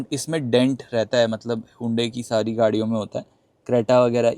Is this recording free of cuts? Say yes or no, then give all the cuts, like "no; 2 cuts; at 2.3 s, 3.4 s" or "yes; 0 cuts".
yes; 0 cuts